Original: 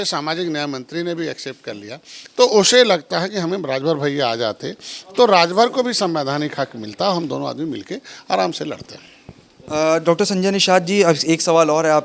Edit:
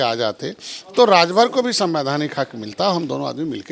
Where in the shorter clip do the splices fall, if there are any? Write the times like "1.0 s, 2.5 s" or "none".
none